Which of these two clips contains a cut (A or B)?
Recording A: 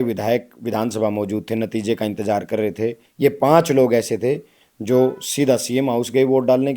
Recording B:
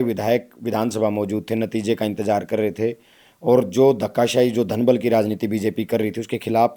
A